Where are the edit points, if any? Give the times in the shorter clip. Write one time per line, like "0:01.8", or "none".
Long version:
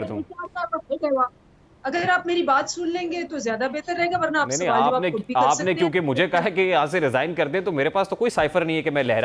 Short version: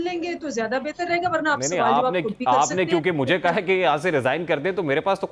none